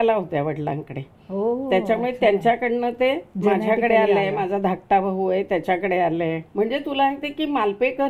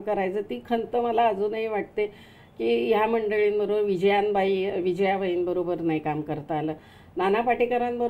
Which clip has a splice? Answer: first; 1 cut; at 6.4 s

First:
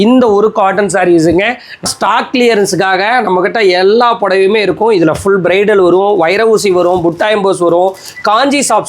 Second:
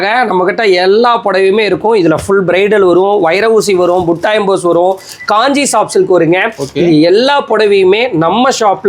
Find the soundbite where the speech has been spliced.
first; 1 cut; at 1.8 s

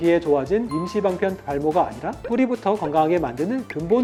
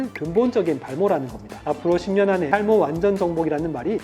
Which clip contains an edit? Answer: second; 1 cut; at 1.7 s

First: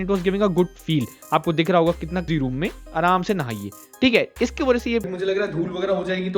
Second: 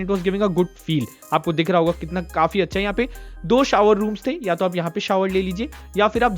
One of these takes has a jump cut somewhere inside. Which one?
first; 2 cuts; at 2.3 s, 5.1 s

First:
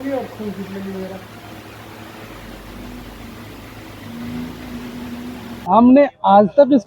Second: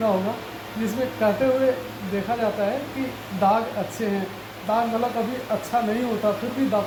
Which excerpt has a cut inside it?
first; 1 cut; at 5.5 s

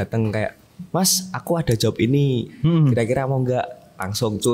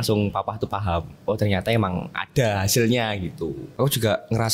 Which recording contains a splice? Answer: second; 1 cut; at 3.6 s

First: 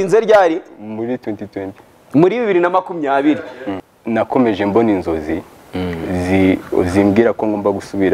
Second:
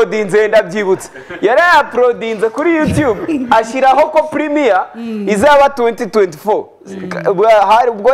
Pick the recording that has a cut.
first; 1 cut; at 3.7 s

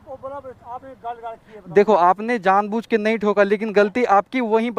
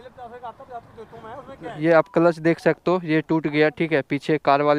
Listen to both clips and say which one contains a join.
second; 1 cut; at 1.7 s

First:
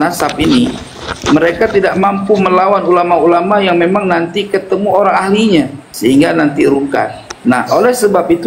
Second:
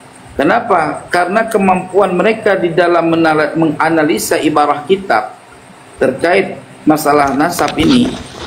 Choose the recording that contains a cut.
first; 2 cuts; at 5.8 s, 7.2 s

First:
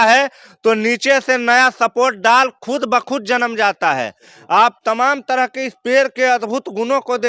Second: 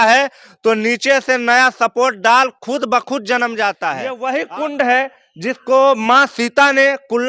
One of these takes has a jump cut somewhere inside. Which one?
second; 1 cut; at 4.1 s

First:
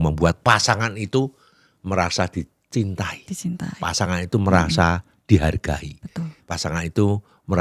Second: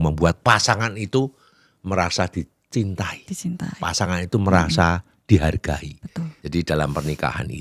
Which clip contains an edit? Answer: second; 1 cut; at 6.4 s

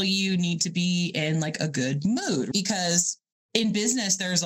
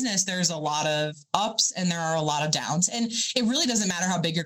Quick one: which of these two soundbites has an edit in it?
first; 1 cut; at 2.5 s

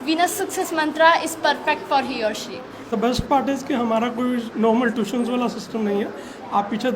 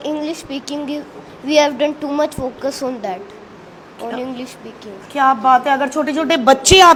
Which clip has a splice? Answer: first; 1 cut; at 2.9 s

